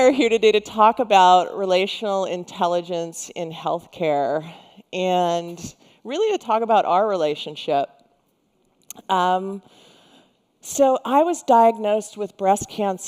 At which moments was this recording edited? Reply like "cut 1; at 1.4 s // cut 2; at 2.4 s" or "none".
none